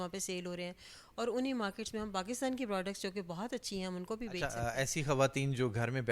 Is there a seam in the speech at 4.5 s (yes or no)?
yes